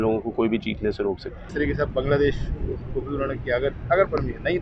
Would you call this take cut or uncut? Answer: cut